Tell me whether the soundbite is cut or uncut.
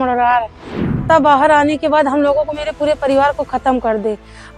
cut